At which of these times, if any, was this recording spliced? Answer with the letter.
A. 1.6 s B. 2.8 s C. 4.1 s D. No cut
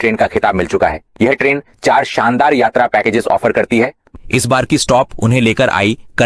C